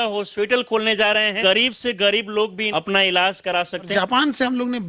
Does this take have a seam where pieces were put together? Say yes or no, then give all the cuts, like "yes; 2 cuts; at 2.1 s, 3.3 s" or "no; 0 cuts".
yes; 3 cuts; at 1.4 s, 2.6 s, 3.9 s